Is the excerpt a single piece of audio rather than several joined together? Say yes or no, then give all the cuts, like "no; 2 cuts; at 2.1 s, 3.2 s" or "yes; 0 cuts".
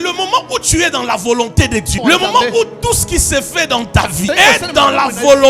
no; 2 cuts; at 1.9 s, 4.3 s